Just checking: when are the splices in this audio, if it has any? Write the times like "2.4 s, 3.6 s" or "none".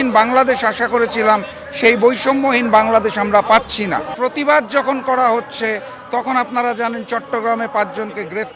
4.1 s